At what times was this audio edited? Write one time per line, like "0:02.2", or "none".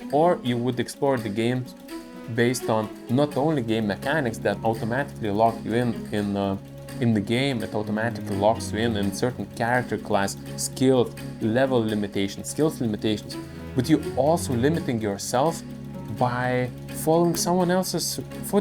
0:04.6